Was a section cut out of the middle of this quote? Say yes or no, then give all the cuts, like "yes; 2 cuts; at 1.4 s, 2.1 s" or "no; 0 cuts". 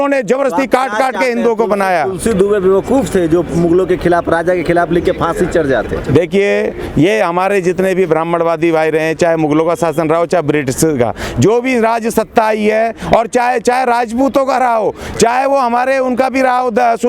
no; 0 cuts